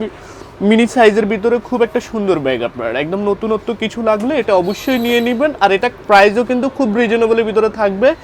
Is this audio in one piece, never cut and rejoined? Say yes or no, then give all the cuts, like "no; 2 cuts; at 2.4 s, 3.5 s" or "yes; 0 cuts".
yes; 0 cuts